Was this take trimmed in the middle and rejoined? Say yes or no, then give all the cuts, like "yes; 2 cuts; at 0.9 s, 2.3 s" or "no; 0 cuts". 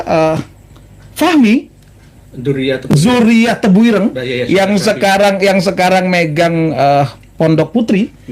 no; 0 cuts